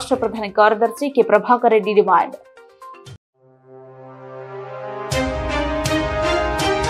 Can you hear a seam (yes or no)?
no